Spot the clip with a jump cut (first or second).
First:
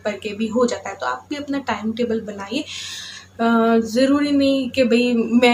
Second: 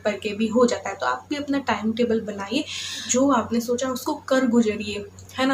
second